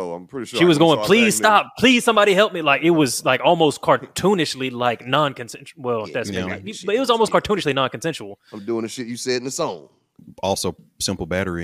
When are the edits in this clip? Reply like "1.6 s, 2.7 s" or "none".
none